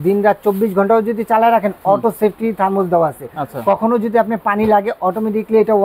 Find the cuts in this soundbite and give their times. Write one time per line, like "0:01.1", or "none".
none

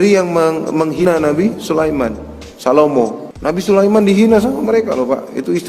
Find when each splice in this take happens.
0:01.0
0:03.3

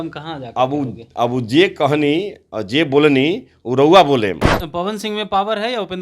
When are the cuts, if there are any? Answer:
0:04.5

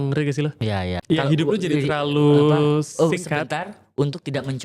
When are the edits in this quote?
0:01.0

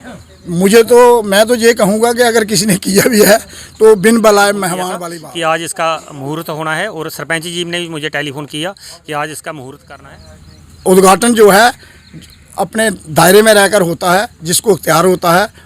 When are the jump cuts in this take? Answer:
0:04.8
0:09.8

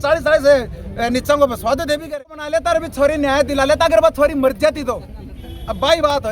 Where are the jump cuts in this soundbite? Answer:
0:02.3

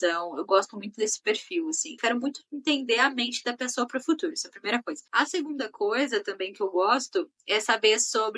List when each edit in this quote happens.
0:01.9
0:05.1

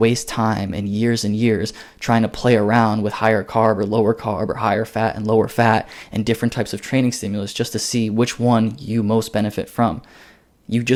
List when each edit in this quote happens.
none

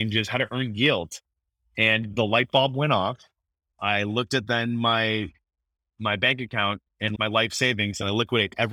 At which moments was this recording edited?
0:07.1

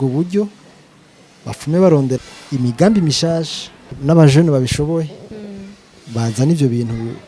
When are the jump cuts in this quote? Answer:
0:02.2
0:03.8

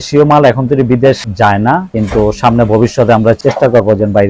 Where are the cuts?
0:03.4

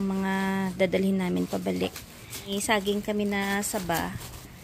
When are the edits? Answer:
0:02.5

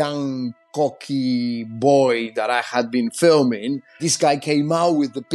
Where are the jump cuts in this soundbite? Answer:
0:04.1

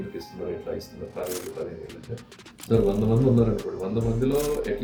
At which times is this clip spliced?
none

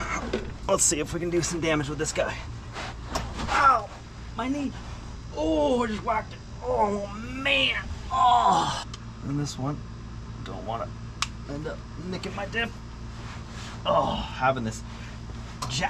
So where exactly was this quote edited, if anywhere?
0:08.8

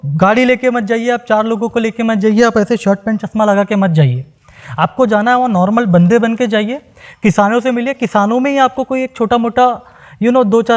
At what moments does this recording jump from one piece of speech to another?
none

